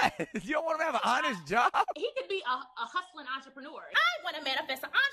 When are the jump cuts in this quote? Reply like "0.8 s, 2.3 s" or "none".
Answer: 2.0 s, 3.9 s